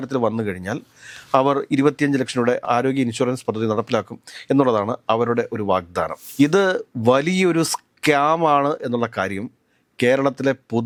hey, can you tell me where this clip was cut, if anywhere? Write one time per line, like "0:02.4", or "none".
none